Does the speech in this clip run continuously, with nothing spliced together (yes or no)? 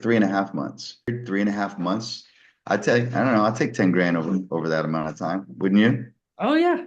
yes